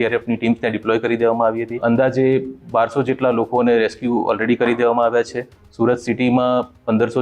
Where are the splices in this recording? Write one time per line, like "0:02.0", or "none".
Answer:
0:01.8